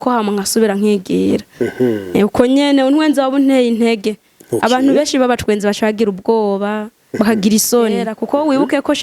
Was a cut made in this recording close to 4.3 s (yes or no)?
no